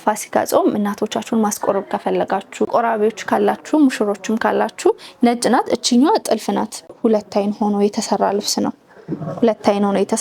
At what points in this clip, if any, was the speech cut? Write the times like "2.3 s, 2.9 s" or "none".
2.7 s, 6.8 s